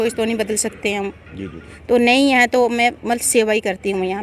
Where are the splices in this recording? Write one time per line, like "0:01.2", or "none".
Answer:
0:01.7